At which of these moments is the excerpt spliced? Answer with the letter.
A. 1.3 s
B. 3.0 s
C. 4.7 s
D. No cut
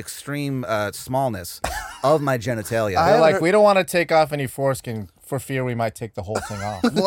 D